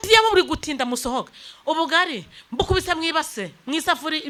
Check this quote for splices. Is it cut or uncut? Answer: uncut